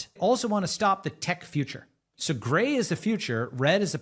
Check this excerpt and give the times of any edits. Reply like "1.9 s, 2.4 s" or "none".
2.1 s